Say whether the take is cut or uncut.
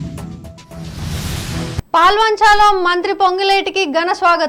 uncut